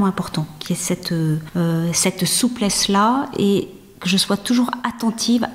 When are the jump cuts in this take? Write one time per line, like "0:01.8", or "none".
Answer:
0:01.5

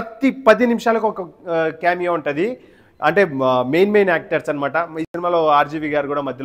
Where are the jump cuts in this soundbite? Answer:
none

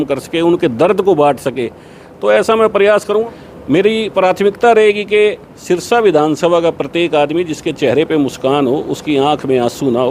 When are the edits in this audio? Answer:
0:03.2

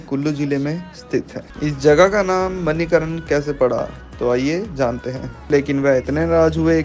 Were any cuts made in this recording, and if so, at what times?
0:01.5
0:05.5

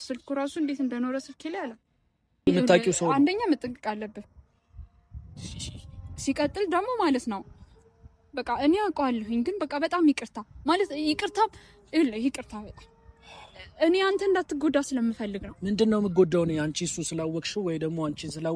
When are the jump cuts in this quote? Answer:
0:02.5

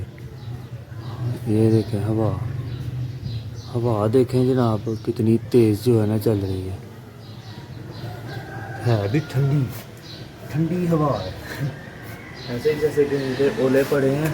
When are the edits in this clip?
none

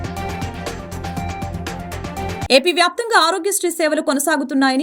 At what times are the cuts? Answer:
0:02.4

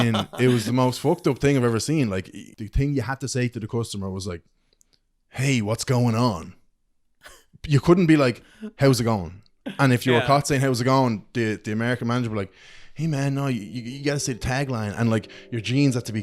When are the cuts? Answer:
0:02.3

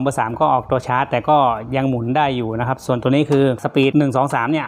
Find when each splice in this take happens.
0:03.7

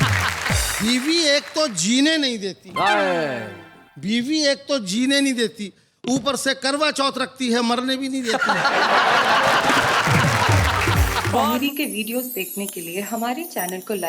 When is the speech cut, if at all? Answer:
0:11.4

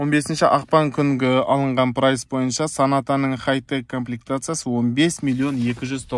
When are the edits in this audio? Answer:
none

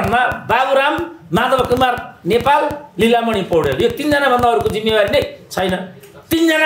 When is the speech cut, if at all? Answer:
none

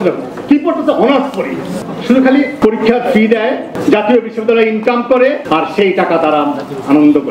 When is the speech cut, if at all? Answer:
0:01.8
0:02.5
0:03.7
0:05.4

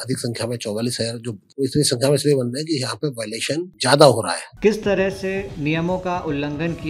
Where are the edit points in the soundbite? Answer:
0:01.4
0:03.7
0:04.4

